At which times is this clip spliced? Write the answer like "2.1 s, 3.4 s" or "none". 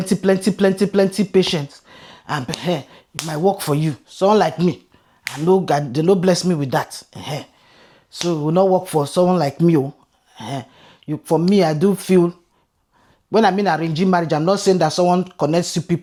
none